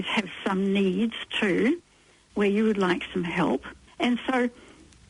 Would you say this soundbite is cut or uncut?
cut